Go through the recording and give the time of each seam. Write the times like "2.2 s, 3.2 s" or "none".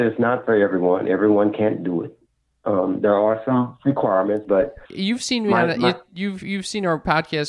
4.9 s